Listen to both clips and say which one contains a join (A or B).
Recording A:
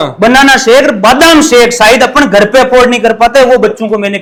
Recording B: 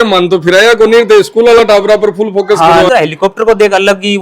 B